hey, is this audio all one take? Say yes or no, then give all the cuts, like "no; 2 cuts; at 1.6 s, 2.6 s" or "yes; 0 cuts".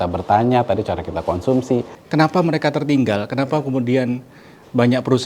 no; 1 cut; at 2.0 s